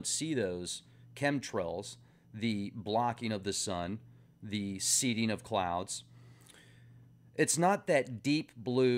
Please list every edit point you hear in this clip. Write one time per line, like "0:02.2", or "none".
none